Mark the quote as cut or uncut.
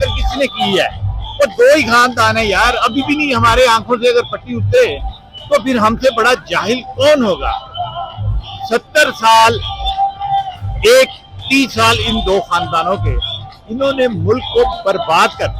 uncut